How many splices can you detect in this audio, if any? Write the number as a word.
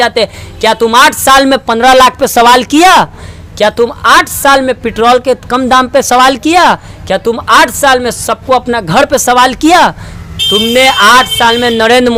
zero